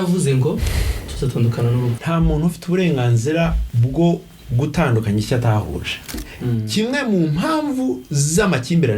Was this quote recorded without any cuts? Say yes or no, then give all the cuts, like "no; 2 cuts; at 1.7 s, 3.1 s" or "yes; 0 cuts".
no; 3 cuts; at 2.0 s, 3.7 s, 6.2 s